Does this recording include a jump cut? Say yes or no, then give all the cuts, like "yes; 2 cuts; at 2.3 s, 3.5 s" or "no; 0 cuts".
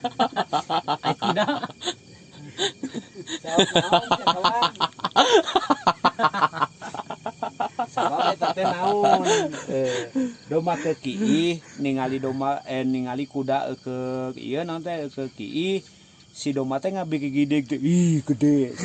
no; 0 cuts